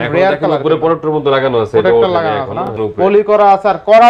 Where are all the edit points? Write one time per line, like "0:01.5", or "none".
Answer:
0:02.8